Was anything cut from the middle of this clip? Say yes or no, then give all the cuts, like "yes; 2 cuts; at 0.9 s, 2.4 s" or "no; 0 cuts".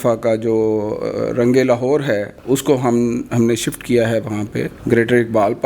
yes; 2 cuts; at 2.3 s, 4.7 s